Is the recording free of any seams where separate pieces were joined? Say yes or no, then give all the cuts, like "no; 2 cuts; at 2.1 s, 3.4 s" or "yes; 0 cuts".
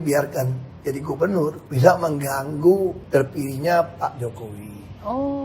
no; 2 cuts; at 1.7 s, 3.0 s